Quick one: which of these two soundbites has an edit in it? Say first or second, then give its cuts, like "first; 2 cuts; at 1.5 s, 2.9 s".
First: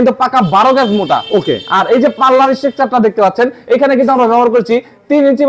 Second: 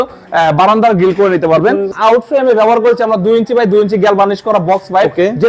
second; 1 cut; at 1.9 s